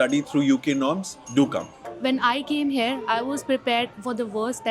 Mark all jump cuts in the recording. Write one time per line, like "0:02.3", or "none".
0:01.9